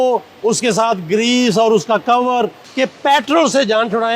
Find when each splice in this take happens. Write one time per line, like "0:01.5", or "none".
0:02.6